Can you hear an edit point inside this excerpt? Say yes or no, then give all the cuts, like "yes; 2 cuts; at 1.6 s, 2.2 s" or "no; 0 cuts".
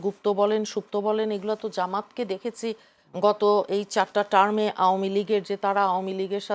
no; 0 cuts